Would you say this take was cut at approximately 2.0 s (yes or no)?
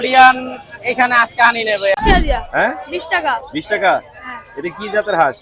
yes